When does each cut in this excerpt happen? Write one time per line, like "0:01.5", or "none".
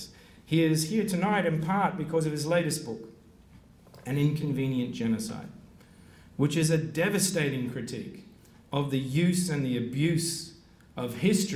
0:09.0

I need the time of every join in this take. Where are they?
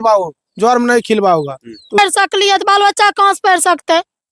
0:02.0

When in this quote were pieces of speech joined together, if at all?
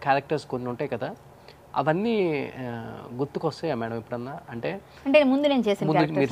none

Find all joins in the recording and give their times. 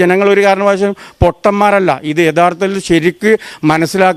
none

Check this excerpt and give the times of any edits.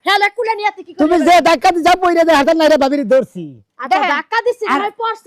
none

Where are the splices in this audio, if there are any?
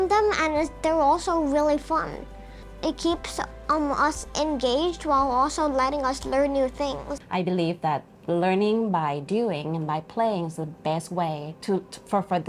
0:02.6
0:07.1

